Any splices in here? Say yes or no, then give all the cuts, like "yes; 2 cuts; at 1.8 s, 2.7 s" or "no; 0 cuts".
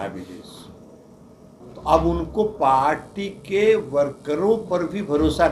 yes; 1 cut; at 1.5 s